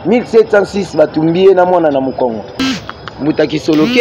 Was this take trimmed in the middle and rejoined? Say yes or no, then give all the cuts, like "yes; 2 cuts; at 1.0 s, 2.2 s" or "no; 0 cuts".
yes; 1 cut; at 2.6 s